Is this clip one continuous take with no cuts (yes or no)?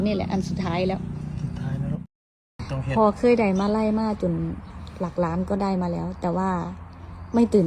no